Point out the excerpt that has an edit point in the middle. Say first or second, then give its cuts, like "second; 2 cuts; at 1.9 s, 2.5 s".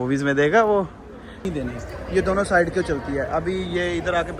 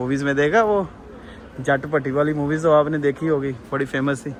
first; 1 cut; at 1.5 s